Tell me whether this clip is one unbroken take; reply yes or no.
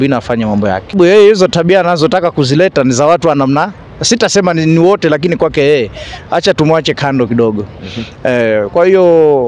no